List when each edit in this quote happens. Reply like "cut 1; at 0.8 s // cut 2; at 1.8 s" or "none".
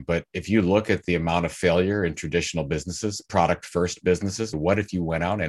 cut 1; at 4.5 s